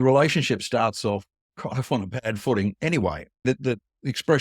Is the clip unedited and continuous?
no; 1 cut; at 3.4 s

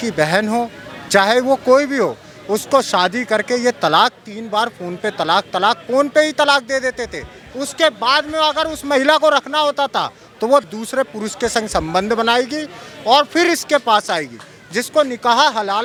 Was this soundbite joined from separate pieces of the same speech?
no; 0 cuts

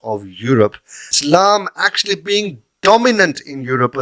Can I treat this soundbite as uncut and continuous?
no; 1 cut; at 1.0 s

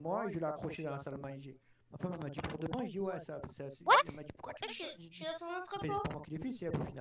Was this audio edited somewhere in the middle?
yes; 1 cut; at 2.9 s

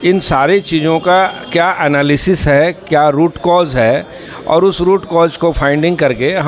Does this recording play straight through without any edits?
yes; 0 cuts

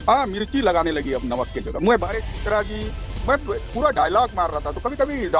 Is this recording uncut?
no; 1 cut; at 2.0 s

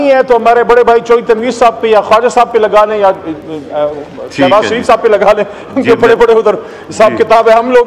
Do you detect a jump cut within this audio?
no; 0 cuts

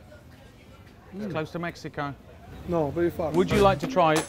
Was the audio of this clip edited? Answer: yes; 1 cut; at 3.3 s

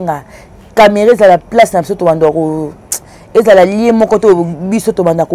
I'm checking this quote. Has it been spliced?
no; 0 cuts

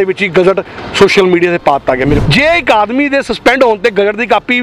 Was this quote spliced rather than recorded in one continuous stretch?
yes; 1 cut; at 2.2 s

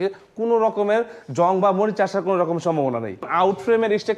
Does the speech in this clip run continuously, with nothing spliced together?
no; 1 cut; at 3.3 s

